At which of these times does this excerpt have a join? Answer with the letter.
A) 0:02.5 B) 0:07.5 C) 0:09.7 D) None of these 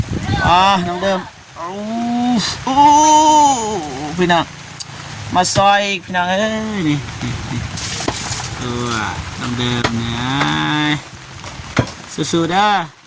D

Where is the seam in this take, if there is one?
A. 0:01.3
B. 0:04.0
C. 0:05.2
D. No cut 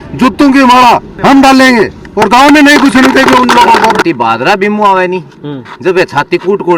B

